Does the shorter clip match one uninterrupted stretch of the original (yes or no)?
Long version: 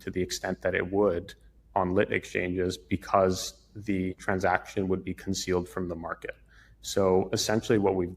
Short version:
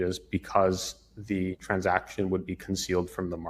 yes